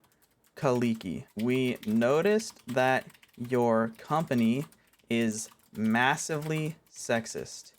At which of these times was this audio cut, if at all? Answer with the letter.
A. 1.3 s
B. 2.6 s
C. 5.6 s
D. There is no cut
A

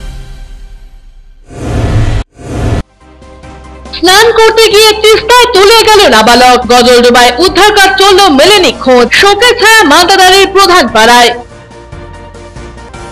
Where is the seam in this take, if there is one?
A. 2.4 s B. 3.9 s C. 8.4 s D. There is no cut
D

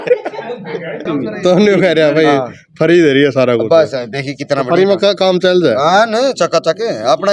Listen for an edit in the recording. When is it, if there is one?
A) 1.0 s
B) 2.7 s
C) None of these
A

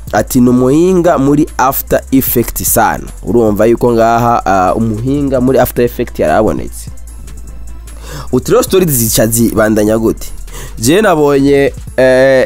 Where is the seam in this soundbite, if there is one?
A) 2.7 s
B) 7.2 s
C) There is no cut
C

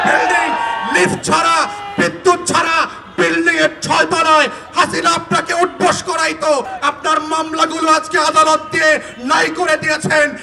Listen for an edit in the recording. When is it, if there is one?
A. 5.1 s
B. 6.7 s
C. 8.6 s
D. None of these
B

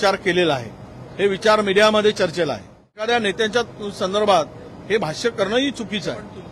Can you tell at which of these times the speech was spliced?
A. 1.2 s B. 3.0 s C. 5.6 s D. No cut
B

